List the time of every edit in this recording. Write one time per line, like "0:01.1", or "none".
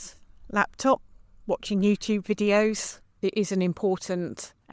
0:03.2